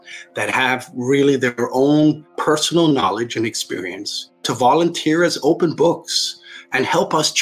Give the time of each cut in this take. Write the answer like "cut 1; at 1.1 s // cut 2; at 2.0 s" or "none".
cut 1; at 2.3 s // cut 2; at 4.4 s

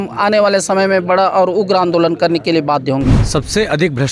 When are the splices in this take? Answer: cut 1; at 3.2 s

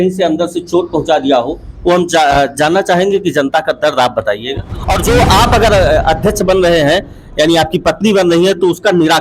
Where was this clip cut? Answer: cut 1; at 5.0 s

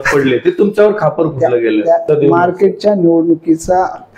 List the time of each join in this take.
cut 1; at 2.0 s

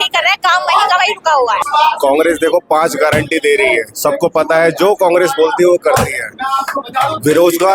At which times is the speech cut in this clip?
cut 1; at 1.6 s

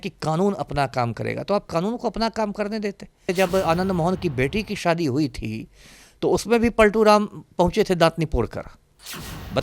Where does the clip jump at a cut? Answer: cut 1; at 3.3 s

